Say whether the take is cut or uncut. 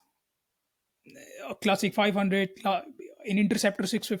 uncut